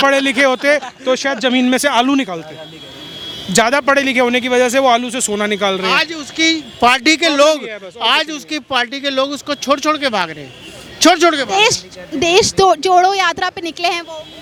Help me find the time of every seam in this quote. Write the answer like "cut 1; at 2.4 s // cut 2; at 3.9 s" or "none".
none

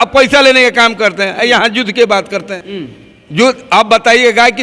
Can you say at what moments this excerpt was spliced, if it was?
cut 1; at 2.6 s

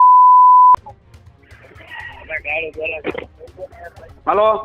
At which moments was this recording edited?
none

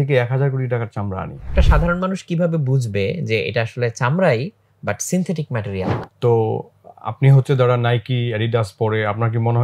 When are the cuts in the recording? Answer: cut 1; at 1.5 s // cut 2; at 6.0 s

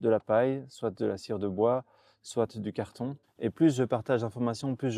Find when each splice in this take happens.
cut 1; at 3.2 s

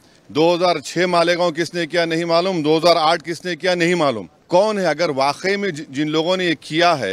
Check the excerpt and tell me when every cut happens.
cut 1; at 4.3 s

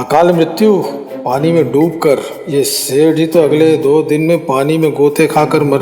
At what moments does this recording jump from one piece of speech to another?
none

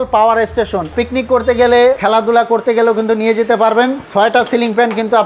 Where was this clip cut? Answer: cut 1; at 0.9 s // cut 2; at 2.0 s // cut 3; at 4.0 s

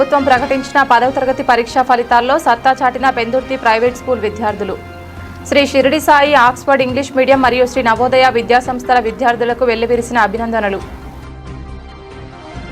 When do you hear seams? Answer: none

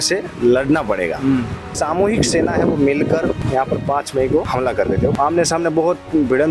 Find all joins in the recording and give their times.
cut 1; at 1.7 s // cut 2; at 3.4 s // cut 3; at 4.9 s

